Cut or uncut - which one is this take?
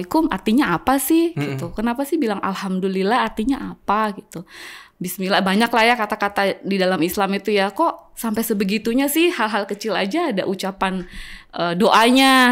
uncut